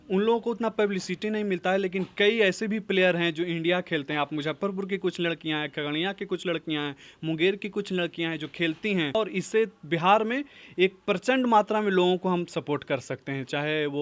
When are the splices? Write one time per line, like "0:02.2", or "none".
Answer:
0:09.1